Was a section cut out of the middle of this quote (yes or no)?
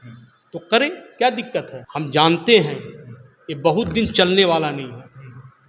yes